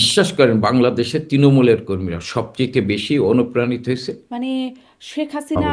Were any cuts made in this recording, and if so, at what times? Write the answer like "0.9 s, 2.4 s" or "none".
none